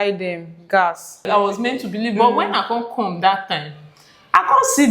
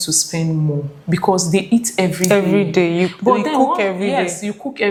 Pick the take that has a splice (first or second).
first